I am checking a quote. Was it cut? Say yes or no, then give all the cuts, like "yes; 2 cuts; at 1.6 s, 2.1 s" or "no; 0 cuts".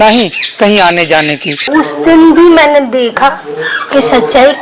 yes; 1 cut; at 1.7 s